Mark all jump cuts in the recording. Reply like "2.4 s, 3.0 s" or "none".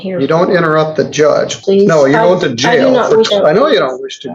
1.6 s, 3.3 s